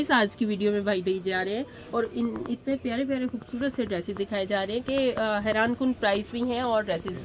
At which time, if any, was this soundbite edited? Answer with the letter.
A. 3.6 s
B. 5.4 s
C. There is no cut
C